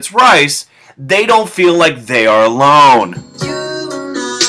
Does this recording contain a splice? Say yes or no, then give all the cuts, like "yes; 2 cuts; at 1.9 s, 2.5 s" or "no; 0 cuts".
no; 0 cuts